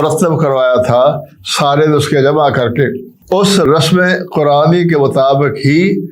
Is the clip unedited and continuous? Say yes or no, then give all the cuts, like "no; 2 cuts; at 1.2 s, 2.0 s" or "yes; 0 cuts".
no; 1 cut; at 3.6 s